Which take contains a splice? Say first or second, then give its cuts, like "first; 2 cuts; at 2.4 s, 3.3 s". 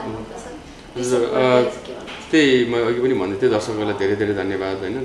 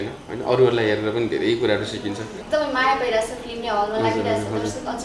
second; 1 cut; at 2.3 s